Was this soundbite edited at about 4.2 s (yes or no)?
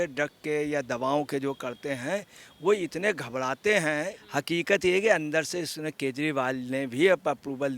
yes